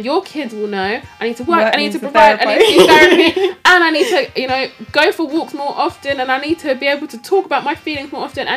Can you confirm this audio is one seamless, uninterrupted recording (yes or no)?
yes